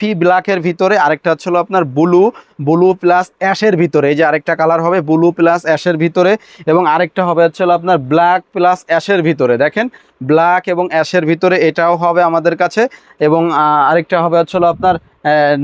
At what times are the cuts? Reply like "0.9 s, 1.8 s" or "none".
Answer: none